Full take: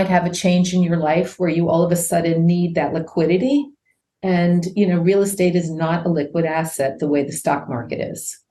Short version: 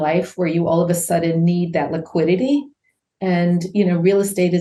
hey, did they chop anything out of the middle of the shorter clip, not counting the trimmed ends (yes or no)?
no